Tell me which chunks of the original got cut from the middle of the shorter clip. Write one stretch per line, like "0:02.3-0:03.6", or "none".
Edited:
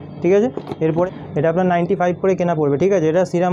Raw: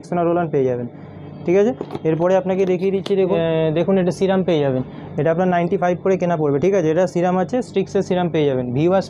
0:02.3-0:04.9